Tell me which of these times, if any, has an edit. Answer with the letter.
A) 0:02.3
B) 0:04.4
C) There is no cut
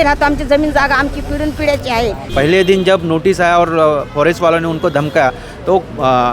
A